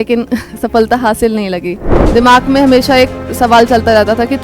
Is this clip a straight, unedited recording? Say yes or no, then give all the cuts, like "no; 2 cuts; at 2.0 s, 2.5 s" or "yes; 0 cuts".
no; 1 cut; at 1.9 s